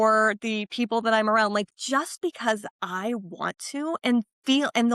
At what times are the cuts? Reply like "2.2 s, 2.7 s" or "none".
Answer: none